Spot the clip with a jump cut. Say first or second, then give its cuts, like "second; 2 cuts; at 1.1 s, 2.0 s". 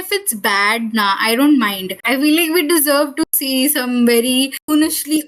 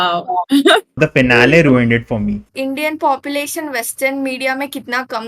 second; 2 cuts; at 0.9 s, 2.5 s